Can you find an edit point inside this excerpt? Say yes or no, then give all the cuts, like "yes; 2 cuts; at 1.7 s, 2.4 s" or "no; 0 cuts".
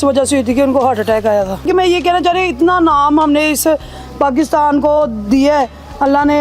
yes; 1 cut; at 1.7 s